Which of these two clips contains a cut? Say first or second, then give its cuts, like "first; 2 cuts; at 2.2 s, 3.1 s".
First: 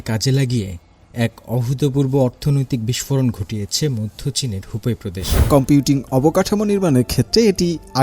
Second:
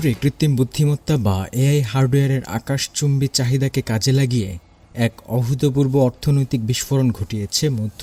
first; 1 cut; at 5.3 s